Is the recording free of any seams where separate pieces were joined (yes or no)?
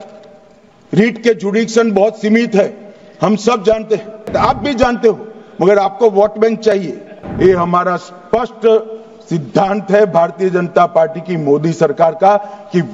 no